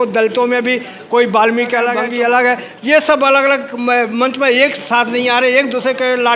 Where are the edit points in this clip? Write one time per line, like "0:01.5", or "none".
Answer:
0:02.1